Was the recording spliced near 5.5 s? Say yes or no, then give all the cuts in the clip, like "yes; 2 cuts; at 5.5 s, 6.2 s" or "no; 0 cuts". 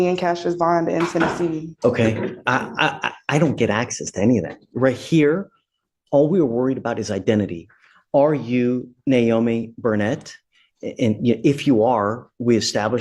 no; 1 cut; at 1.7 s